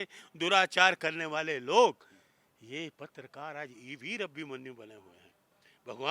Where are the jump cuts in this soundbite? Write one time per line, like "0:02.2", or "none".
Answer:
none